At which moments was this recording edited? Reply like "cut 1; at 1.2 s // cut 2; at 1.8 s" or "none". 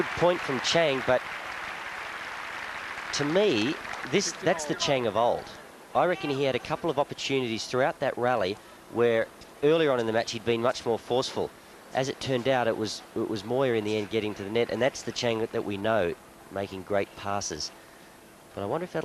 cut 1; at 2.6 s